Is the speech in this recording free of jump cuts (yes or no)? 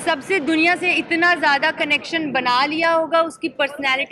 yes